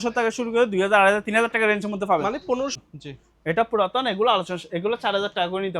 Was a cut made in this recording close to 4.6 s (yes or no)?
no